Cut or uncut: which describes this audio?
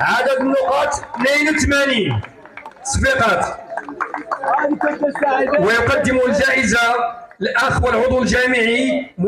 uncut